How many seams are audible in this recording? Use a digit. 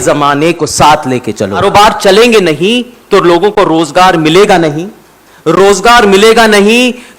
1